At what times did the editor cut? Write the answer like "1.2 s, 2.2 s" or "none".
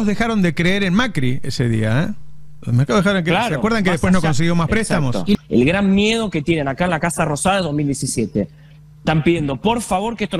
5.3 s